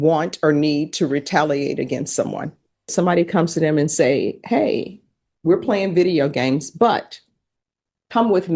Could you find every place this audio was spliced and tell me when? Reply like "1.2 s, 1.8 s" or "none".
2.9 s